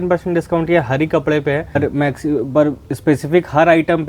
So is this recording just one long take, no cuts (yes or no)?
no